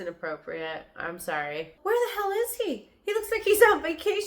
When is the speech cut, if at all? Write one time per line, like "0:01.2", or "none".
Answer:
0:01.7